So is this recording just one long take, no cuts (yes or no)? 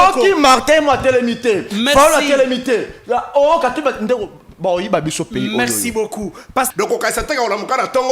no